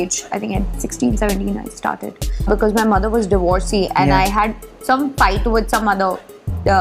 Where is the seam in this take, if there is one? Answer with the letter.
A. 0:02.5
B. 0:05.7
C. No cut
A